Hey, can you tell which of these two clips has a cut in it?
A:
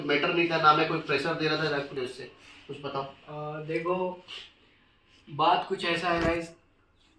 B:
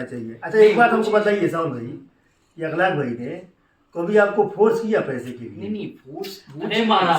A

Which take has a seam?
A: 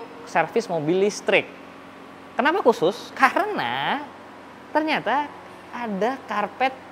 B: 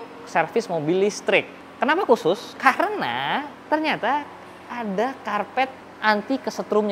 B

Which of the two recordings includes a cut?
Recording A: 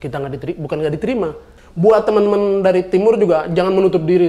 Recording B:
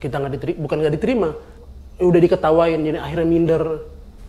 A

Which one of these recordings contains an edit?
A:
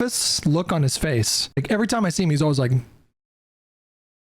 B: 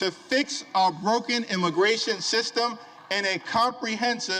A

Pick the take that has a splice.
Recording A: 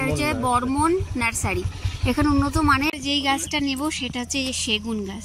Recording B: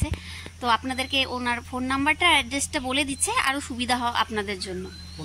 A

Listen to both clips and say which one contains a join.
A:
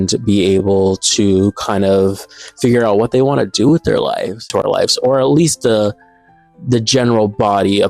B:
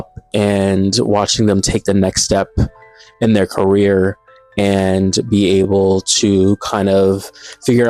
A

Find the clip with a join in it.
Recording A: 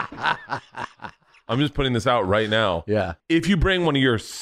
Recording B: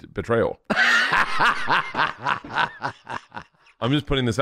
A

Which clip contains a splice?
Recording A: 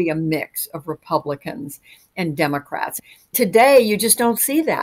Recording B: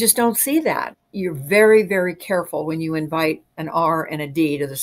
A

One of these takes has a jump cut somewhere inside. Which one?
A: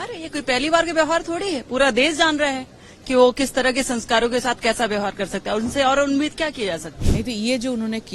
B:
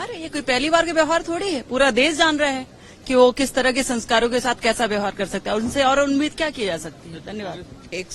A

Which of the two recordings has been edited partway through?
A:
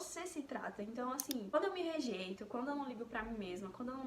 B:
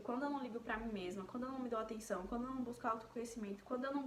A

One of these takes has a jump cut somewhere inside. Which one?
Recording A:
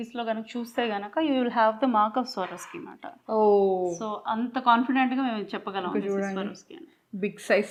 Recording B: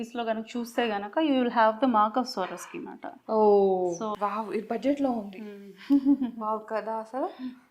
B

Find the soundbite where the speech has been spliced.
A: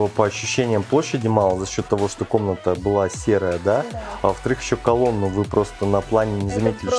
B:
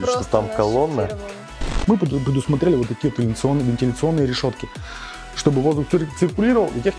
B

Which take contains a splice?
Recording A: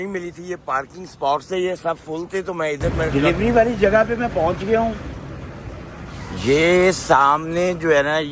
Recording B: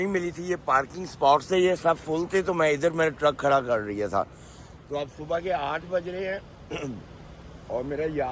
A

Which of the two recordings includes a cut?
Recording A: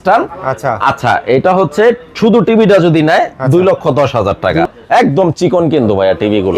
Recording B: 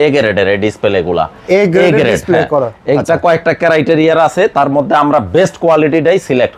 A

